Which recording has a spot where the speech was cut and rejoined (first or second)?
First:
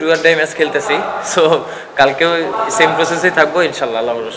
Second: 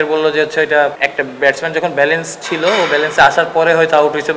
second